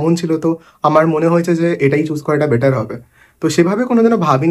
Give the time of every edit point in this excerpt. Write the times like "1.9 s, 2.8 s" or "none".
none